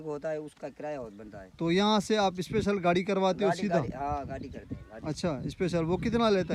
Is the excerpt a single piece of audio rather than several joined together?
yes; 0 cuts

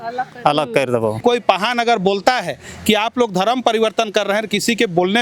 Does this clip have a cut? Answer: yes; 1 cut; at 1.2 s

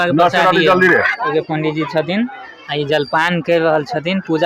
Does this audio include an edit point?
yes; 1 cut; at 1.3 s

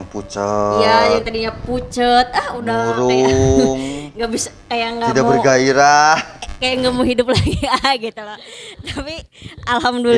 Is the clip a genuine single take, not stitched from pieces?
yes; 0 cuts

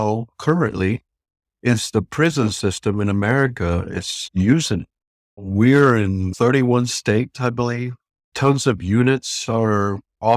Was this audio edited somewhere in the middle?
yes; 2 cuts; at 5.4 s, 6.3 s

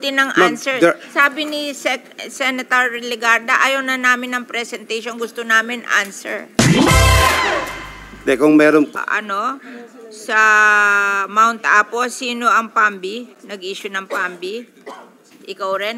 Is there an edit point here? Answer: yes; 1 cut; at 8.9 s

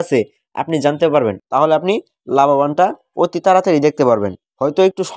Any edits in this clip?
yes; 1 cut; at 1.4 s

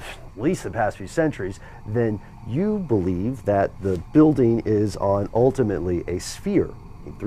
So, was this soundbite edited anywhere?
yes; 1 cut; at 4.1 s

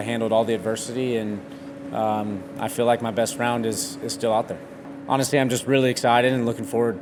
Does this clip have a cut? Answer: no; 0 cuts

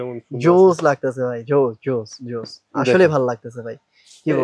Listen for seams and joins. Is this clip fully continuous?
yes; 0 cuts

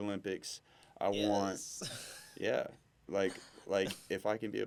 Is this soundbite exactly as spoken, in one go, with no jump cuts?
yes; 0 cuts

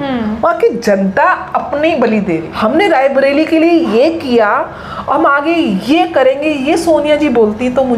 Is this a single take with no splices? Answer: no; 1 cut; at 2.5 s

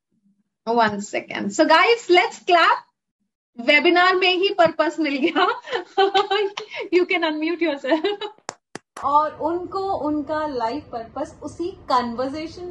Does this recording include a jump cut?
yes; 1 cut; at 9.0 s

